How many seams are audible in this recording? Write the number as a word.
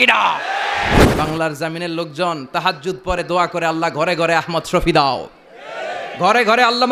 one